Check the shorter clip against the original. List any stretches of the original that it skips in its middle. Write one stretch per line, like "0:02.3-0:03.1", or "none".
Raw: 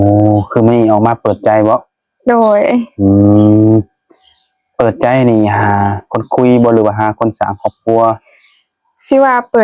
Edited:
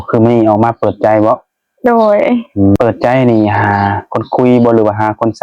0:03.2-0:04.8